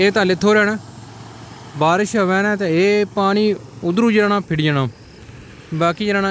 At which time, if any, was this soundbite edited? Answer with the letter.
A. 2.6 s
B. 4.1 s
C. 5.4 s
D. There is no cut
D